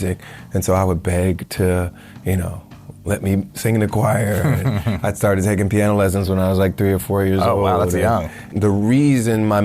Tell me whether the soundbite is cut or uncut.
cut